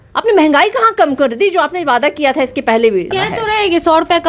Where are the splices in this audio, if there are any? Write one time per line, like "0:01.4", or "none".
0:03.1